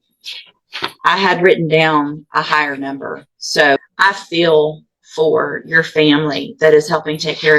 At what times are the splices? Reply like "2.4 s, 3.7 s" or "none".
3.8 s

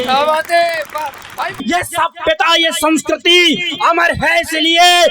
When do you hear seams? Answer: 1.6 s

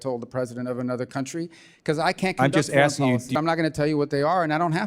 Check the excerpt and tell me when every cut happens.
3.4 s

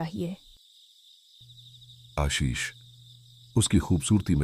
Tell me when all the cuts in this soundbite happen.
none

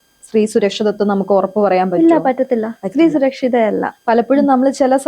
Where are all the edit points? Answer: none

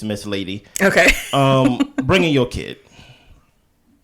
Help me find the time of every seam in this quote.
none

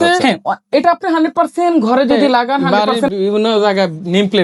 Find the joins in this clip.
2.6 s

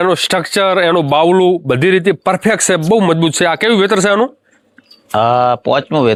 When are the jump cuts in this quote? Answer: none

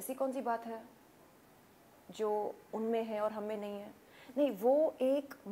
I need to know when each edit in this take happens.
none

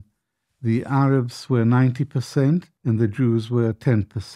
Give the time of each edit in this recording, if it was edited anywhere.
2.7 s

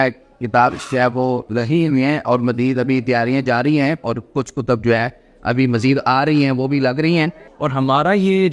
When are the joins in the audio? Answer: 7.5 s

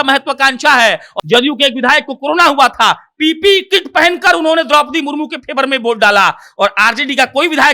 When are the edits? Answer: 1.1 s

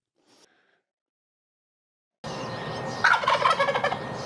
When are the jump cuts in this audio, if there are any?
none

